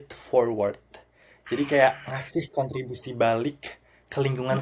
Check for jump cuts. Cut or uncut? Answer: uncut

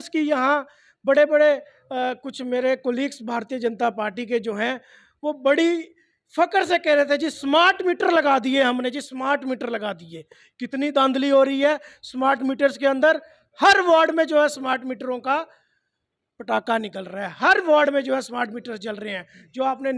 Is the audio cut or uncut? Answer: uncut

